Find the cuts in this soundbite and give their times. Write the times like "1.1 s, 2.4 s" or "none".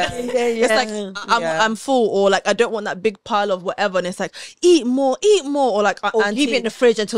none